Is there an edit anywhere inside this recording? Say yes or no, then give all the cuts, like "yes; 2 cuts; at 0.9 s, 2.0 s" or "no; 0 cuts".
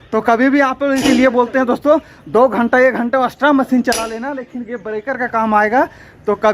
yes; 1 cut; at 1.0 s